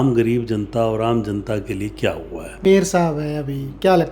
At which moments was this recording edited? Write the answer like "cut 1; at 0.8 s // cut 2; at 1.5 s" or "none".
cut 1; at 2.7 s